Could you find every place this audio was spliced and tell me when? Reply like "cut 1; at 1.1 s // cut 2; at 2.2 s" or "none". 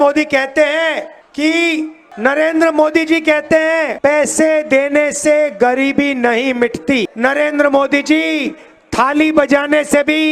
cut 1; at 1.2 s // cut 2; at 2.0 s // cut 3; at 3.9 s // cut 4; at 7.1 s